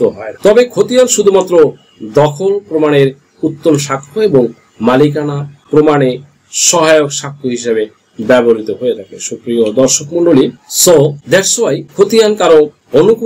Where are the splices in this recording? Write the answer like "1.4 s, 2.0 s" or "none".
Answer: 11.9 s